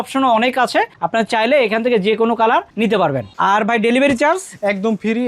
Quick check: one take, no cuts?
no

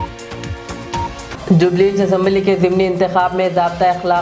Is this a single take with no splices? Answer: yes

